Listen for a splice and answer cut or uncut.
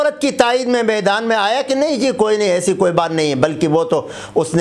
uncut